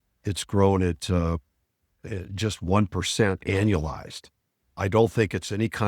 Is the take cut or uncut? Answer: cut